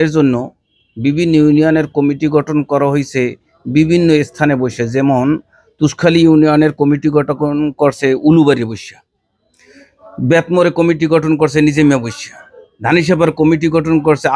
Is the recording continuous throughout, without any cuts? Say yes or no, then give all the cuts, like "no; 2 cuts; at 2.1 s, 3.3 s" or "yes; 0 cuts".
yes; 0 cuts